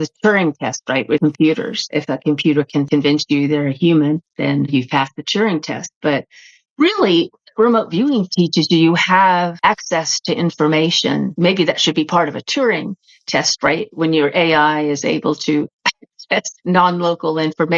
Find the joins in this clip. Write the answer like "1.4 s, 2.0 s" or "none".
1.2 s, 1.8 s, 2.9 s, 9.5 s, 11.3 s